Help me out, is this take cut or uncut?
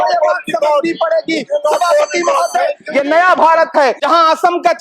cut